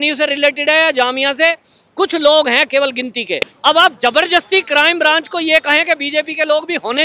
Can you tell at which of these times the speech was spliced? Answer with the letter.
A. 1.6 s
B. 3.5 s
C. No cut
B